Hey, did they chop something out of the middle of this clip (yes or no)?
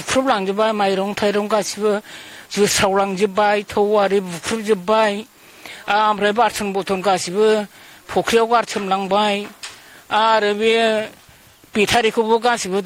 no